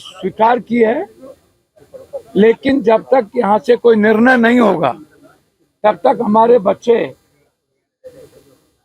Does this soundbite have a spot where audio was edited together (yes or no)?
no